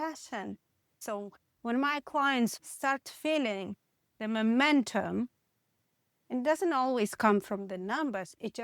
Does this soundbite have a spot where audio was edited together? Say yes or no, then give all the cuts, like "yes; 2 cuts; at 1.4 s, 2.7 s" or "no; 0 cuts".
yes; 2 cuts; at 1.0 s, 2.6 s